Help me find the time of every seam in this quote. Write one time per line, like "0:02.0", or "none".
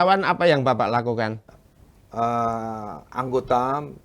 0:01.4